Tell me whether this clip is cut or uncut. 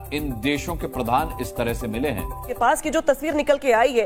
uncut